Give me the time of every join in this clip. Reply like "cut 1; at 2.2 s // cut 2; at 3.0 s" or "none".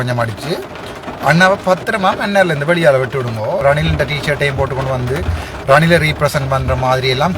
cut 1; at 3.6 s